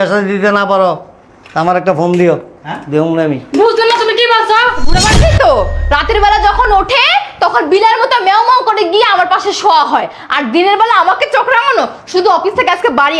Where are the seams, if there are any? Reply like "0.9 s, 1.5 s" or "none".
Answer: 5.1 s